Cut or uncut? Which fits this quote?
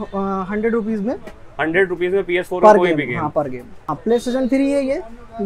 cut